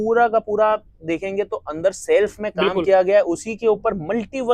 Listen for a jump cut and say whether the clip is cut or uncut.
uncut